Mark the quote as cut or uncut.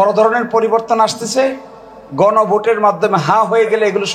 uncut